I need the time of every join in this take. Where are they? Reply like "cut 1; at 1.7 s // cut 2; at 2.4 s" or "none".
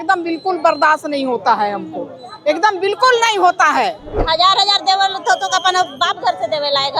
cut 1; at 4.1 s